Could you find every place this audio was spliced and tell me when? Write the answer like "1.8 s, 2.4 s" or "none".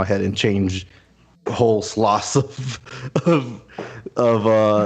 none

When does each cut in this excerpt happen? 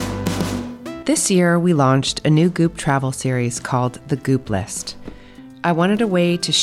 1.0 s

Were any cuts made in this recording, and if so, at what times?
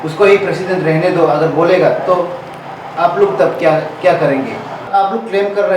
4.9 s

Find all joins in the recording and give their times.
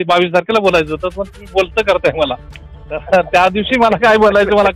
none

